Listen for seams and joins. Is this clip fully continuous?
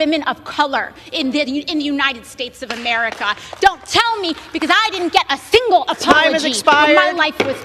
yes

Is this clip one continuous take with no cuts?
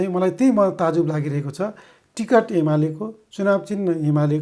yes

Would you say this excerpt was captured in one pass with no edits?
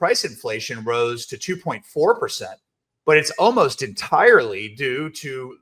yes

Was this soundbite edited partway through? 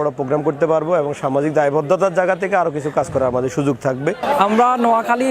yes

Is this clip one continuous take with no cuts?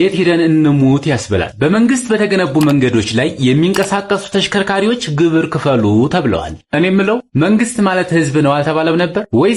yes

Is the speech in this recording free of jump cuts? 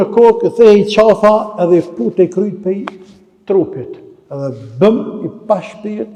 yes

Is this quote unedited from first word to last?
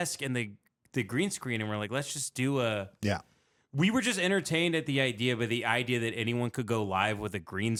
yes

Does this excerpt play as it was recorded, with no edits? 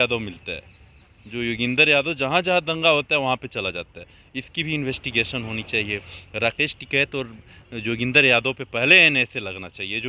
yes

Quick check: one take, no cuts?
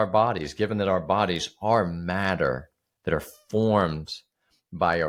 yes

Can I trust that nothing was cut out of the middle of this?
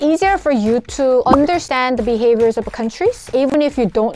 no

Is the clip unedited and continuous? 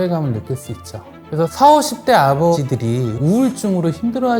no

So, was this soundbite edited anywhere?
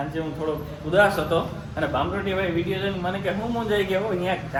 no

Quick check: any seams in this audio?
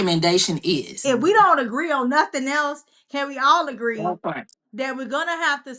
yes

